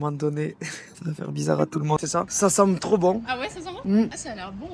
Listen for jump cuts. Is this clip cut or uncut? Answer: cut